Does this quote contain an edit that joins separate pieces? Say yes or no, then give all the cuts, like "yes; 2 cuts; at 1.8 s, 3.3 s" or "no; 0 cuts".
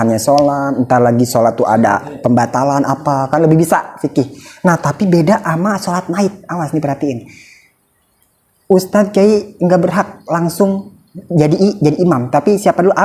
no; 0 cuts